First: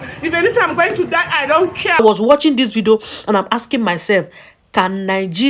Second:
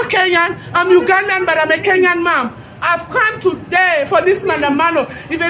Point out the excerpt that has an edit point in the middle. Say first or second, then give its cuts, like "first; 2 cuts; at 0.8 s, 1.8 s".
first; 1 cut; at 2.0 s